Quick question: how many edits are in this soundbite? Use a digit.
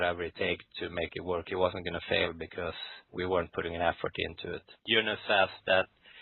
1